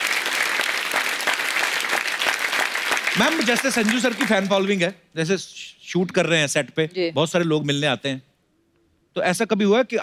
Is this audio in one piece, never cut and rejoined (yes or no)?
yes